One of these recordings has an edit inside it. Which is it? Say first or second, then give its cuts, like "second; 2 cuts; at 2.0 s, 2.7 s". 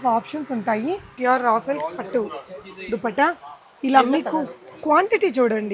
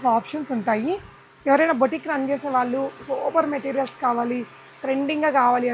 first; 1 cut; at 1.1 s